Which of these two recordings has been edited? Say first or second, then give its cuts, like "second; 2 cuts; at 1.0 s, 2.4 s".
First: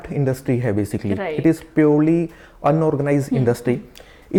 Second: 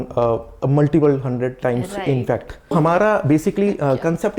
second; 1 cut; at 2.7 s